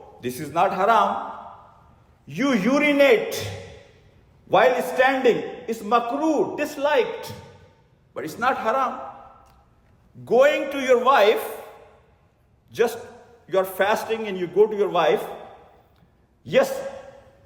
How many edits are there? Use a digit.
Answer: 0